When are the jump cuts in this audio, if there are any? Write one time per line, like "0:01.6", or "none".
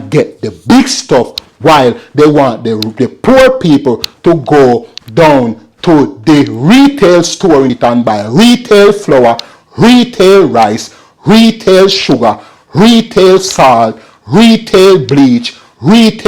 0:07.7